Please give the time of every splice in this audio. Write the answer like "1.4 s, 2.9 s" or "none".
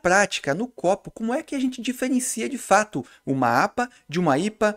none